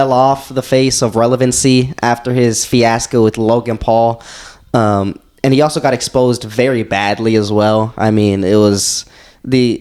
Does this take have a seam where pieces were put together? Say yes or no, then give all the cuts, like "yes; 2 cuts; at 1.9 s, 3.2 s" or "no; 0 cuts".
no; 0 cuts